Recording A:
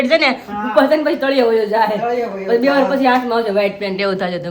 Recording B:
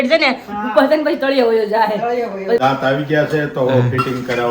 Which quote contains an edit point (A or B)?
B